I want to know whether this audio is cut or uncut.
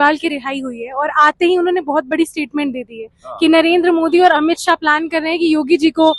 uncut